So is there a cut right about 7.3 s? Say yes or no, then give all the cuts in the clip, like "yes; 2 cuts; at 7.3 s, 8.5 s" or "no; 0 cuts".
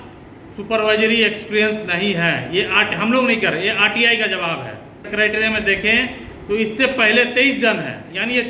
no; 1 cut; at 5.1 s